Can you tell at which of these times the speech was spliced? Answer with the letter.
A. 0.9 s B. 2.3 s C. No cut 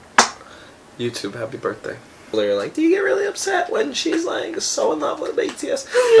B